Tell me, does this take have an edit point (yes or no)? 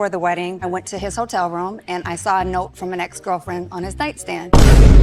no